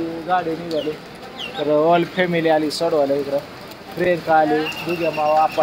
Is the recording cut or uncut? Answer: uncut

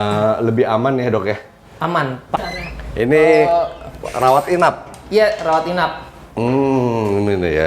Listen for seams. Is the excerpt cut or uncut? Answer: cut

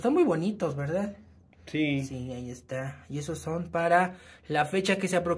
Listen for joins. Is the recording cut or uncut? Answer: uncut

